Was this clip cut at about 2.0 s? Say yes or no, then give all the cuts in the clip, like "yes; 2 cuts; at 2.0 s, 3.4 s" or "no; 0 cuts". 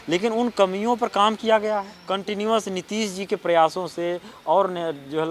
yes; 1 cut; at 2.0 s